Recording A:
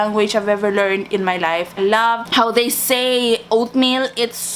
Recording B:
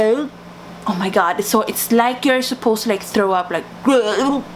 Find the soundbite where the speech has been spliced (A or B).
A